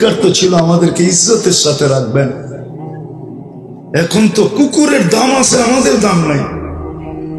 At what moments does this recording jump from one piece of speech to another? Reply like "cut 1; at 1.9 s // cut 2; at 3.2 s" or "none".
cut 1; at 2.5 s // cut 2; at 3.9 s // cut 3; at 6.5 s